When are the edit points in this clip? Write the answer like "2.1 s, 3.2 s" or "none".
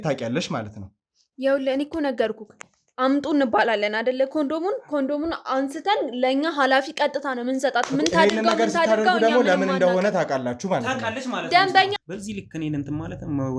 12.0 s